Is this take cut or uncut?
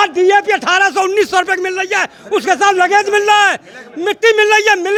uncut